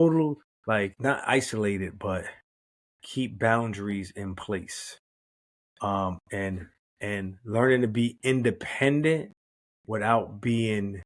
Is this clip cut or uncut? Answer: cut